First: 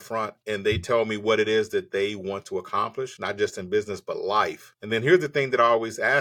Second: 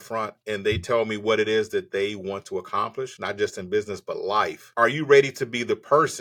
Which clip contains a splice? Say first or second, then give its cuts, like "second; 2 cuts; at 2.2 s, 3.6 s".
second; 1 cut; at 4.6 s